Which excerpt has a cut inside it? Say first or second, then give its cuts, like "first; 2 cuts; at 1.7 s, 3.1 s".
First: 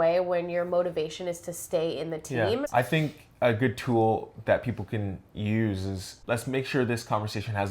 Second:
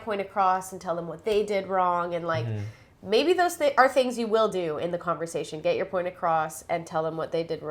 first; 2 cuts; at 2.7 s, 6.1 s